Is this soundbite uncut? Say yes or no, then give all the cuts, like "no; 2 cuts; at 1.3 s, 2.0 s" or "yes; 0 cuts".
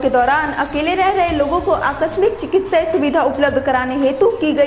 yes; 0 cuts